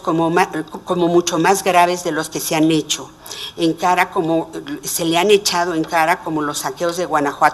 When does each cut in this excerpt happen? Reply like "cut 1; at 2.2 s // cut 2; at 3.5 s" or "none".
cut 1; at 5.2 s